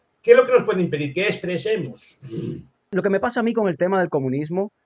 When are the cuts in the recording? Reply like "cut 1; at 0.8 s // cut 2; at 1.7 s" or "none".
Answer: cut 1; at 2.7 s